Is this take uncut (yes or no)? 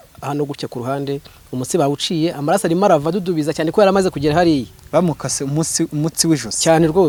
yes